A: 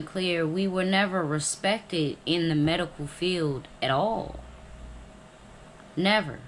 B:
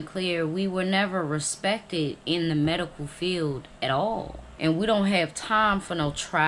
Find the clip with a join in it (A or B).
B